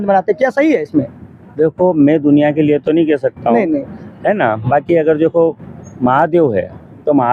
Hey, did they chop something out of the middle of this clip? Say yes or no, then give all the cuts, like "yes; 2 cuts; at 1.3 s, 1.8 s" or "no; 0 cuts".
no; 0 cuts